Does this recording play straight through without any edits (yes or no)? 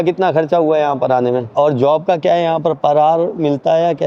no